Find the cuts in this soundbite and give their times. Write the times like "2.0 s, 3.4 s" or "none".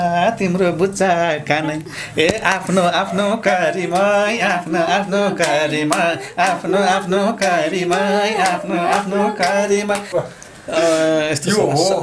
10.1 s